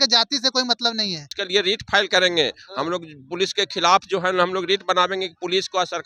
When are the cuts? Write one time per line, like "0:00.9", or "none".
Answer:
0:01.4